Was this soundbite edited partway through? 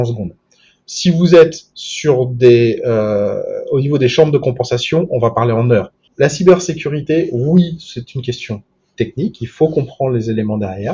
yes; 1 cut; at 6.0 s

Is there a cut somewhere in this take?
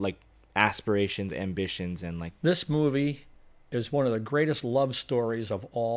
yes; 1 cut; at 2.3 s

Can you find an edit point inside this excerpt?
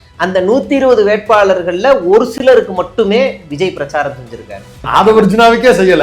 yes; 1 cut; at 4.8 s

